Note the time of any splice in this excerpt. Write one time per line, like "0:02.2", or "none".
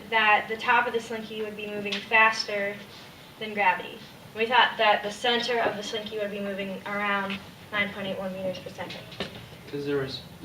0:01.6